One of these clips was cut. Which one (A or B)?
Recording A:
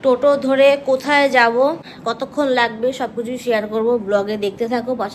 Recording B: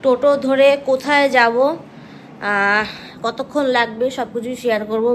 A